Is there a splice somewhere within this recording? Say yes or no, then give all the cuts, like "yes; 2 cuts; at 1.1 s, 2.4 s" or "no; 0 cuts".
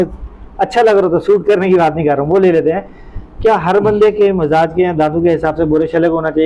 no; 0 cuts